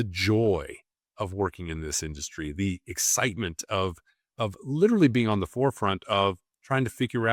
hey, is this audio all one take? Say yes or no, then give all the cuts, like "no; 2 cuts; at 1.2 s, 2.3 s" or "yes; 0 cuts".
yes; 0 cuts